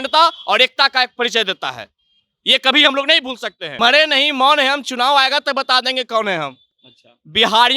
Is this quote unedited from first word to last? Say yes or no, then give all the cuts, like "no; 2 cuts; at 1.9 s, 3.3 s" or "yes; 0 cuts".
no; 1 cut; at 3.6 s